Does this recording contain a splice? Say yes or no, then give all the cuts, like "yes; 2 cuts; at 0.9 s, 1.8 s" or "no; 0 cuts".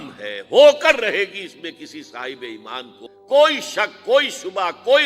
yes; 1 cut; at 3.0 s